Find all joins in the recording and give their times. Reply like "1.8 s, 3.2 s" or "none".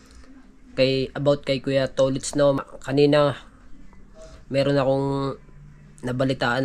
2.6 s